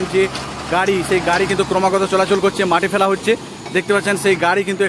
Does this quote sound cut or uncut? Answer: uncut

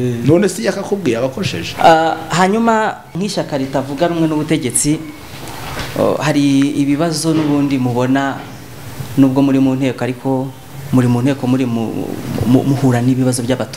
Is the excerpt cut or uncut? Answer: cut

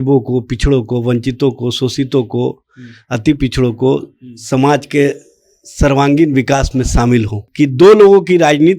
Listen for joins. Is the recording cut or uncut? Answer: cut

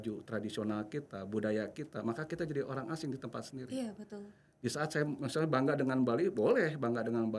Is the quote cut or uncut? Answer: uncut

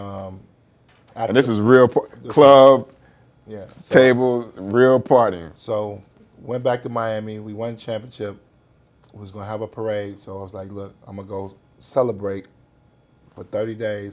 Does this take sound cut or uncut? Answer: uncut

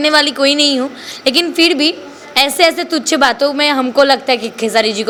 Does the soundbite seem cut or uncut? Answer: uncut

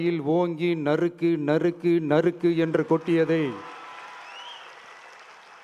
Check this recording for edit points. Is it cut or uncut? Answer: uncut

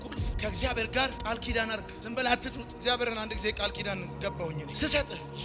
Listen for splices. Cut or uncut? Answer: uncut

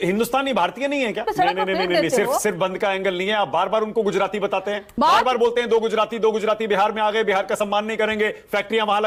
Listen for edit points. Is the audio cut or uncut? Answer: uncut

